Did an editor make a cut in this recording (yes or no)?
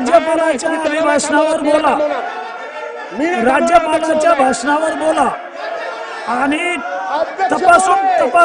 no